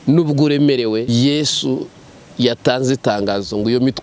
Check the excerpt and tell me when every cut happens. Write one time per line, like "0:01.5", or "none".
0:01.1